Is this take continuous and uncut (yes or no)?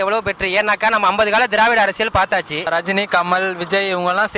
no